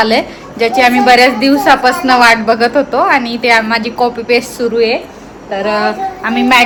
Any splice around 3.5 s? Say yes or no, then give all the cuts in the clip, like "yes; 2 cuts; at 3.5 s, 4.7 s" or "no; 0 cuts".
no; 0 cuts